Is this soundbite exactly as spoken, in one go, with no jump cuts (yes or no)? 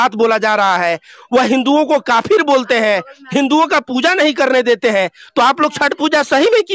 yes